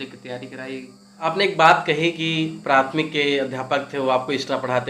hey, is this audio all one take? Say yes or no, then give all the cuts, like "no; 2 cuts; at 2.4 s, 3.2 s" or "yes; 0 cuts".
no; 1 cut; at 1.1 s